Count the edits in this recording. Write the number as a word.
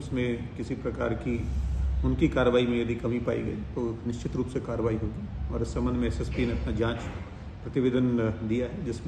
zero